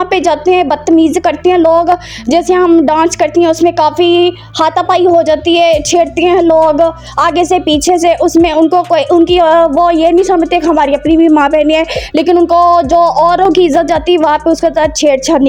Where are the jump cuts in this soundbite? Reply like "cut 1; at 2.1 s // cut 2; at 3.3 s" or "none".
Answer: none